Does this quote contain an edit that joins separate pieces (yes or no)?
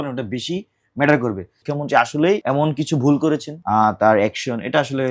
yes